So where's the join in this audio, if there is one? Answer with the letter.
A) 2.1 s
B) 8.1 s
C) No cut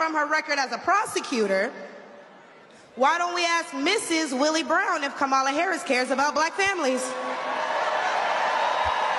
C